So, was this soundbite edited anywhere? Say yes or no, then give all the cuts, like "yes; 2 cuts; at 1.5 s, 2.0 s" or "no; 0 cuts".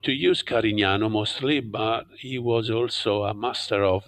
no; 0 cuts